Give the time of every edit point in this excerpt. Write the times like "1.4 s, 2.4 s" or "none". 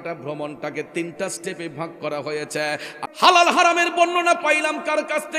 2.9 s